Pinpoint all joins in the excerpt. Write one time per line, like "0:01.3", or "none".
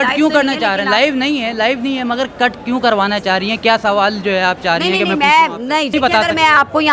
0:05.9